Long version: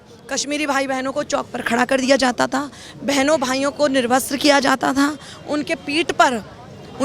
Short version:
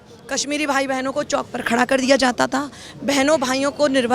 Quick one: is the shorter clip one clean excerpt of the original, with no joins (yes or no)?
yes